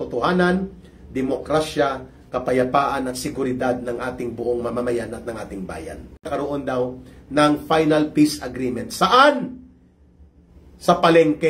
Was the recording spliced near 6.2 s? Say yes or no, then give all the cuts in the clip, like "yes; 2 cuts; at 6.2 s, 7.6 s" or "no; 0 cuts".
yes; 1 cut; at 6.2 s